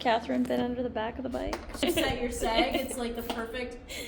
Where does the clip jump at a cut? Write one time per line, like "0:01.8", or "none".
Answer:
0:01.8

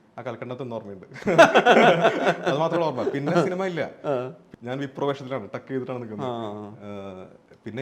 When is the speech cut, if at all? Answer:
0:04.4

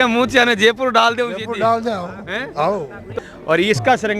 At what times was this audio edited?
0:03.1

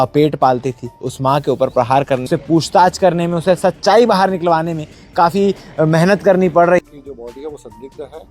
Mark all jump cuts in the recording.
0:02.2
0:06.8

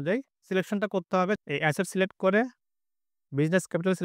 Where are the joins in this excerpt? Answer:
0:01.4

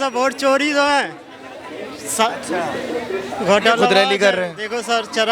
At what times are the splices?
none

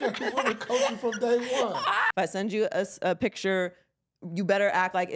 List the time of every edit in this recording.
0:02.0

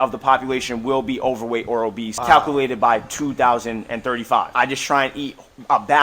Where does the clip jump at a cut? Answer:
0:02.1
0:04.5

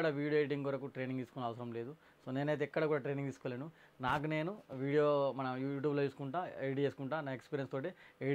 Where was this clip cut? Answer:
none

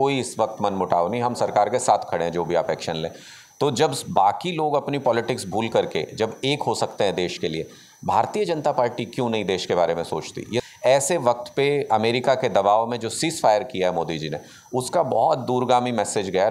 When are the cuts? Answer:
0:10.6

